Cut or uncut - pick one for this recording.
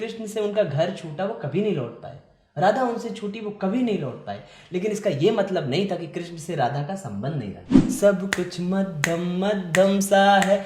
cut